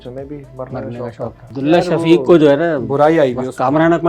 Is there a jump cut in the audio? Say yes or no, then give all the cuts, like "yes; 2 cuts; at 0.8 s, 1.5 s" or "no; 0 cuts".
yes; 1 cut; at 1.4 s